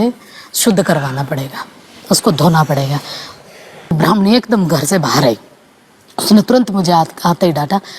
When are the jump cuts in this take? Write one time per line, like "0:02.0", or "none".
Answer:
0:04.0